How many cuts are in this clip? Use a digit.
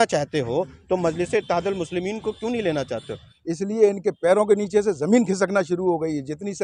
1